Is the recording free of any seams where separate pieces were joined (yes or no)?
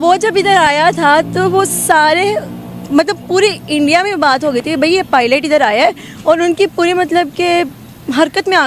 yes